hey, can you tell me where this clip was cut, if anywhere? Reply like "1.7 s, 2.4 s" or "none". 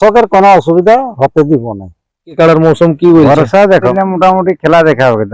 2.4 s, 3.9 s